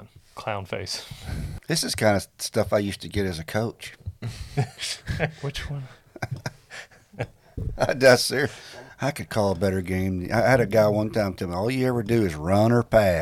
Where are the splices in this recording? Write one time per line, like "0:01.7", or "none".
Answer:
0:01.5